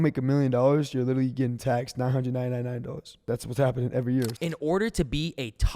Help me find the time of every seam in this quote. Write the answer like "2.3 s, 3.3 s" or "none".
3.1 s, 4.3 s